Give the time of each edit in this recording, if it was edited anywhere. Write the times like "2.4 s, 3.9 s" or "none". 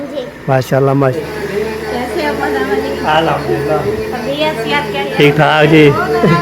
1.2 s, 5.1 s